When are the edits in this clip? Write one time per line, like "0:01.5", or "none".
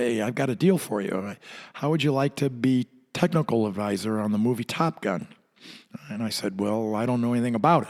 none